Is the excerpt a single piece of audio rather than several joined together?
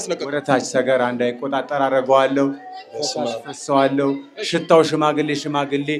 yes; 0 cuts

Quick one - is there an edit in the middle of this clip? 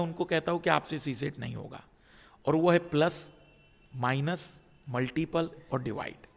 no; 0 cuts

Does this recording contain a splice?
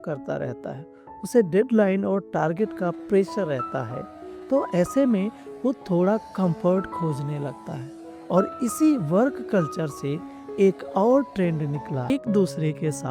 yes; 1 cut; at 12.1 s

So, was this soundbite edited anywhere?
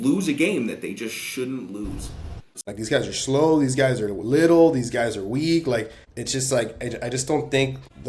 yes; 1 cut; at 2.7 s

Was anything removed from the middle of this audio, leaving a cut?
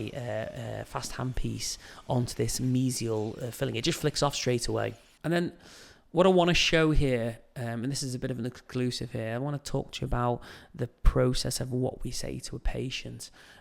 yes; 1 cut; at 5.1 s

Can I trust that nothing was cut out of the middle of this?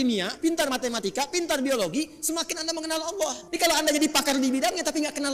no; 1 cut; at 3.4 s

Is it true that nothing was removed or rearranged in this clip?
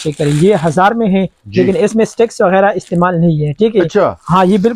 yes; 0 cuts

